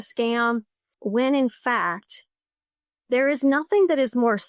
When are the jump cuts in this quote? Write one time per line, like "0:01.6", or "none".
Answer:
0:01.0